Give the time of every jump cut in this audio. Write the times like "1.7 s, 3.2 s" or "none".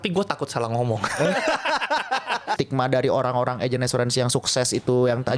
2.6 s